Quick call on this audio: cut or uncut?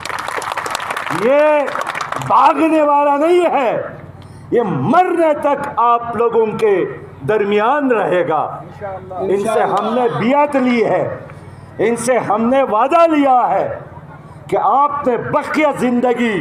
uncut